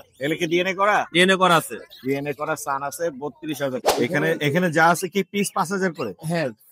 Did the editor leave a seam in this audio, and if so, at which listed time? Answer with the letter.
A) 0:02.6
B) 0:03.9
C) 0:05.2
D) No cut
B